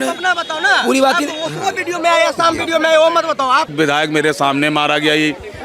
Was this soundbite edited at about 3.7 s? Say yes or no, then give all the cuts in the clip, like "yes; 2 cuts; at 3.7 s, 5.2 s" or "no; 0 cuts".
yes; 1 cut; at 3.7 s